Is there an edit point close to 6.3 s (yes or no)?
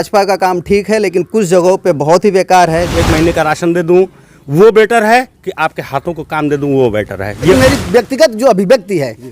no